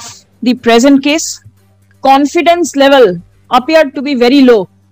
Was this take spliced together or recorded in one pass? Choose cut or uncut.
cut